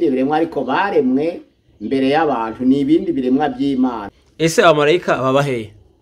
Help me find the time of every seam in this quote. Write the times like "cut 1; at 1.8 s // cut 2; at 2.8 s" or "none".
cut 1; at 4.1 s